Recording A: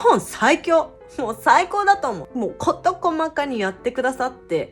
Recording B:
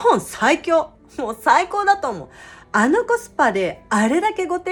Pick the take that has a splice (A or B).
A